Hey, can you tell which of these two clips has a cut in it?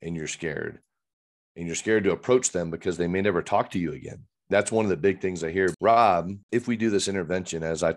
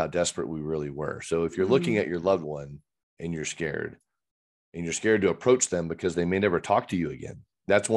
first; 2 cuts; at 5.7 s, 6.4 s

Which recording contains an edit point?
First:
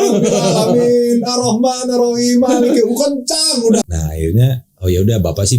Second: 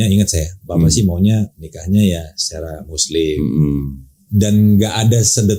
first; 1 cut; at 3.8 s

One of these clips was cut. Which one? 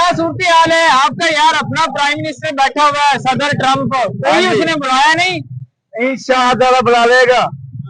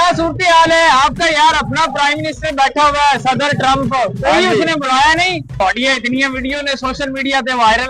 second; 1 cut; at 5.6 s

